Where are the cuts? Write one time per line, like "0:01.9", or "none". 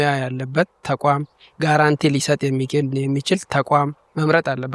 none